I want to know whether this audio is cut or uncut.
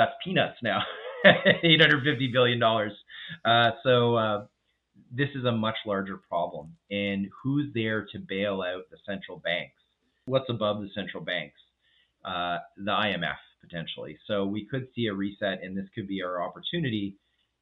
cut